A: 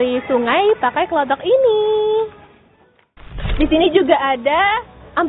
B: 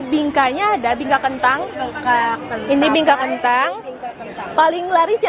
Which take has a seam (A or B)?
A